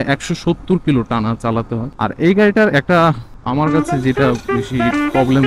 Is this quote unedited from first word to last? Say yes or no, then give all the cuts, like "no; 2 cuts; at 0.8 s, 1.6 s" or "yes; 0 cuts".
no; 1 cut; at 1.8 s